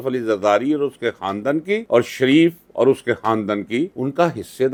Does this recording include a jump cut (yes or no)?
no